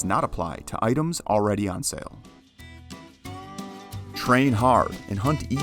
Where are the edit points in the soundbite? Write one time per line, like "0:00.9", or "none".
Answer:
0:02.1